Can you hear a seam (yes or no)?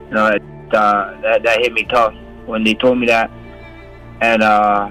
no